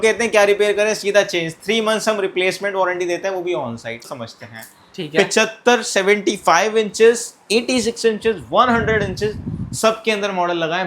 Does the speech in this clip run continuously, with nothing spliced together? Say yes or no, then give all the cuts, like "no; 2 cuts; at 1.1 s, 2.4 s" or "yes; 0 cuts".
no; 1 cut; at 4.1 s